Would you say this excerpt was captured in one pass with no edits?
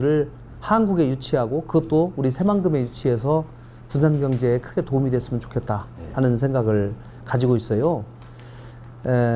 yes; 0 cuts

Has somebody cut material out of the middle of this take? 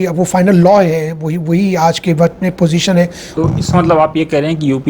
yes; 1 cut; at 3.2 s

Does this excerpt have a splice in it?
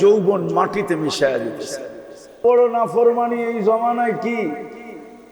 yes; 1 cut; at 2.4 s

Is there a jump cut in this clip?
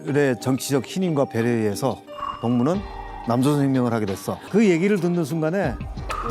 yes; 1 cut; at 4.3 s

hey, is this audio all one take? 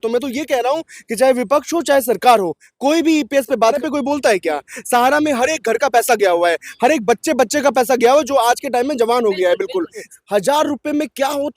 no; 2 cuts; at 3.8 s, 10.1 s

